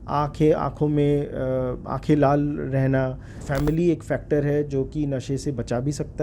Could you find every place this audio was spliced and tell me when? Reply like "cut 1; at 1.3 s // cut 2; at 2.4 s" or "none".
cut 1; at 3.3 s